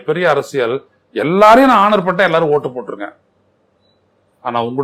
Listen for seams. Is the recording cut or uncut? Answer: uncut